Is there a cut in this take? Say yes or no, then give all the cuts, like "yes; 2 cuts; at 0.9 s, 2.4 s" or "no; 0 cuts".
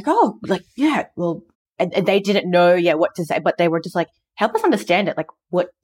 no; 0 cuts